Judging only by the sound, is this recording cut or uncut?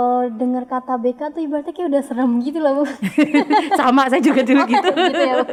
uncut